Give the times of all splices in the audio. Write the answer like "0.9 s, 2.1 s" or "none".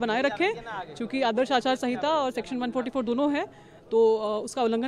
none